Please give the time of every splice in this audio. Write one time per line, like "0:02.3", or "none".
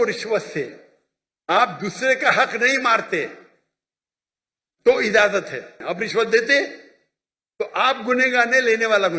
0:05.8